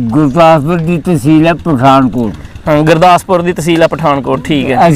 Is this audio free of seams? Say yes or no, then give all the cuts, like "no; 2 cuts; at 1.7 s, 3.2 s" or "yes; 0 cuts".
yes; 0 cuts